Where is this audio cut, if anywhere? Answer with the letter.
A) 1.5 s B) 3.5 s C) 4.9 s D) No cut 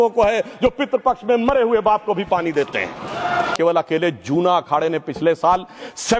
B